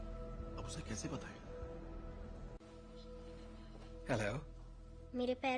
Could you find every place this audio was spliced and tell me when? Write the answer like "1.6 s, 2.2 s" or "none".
none